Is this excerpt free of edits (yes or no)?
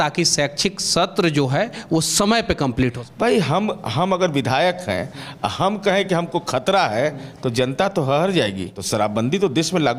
no